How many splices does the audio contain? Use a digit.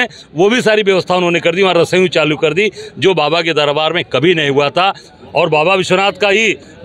1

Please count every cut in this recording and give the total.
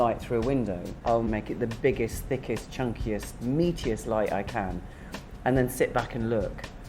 1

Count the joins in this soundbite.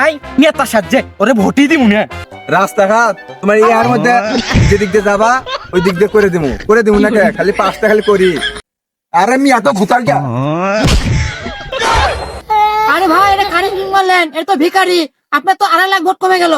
2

